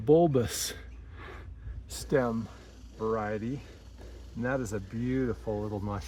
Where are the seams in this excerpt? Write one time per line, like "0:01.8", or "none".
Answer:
none